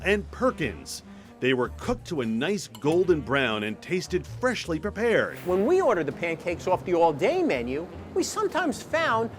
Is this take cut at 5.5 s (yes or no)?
yes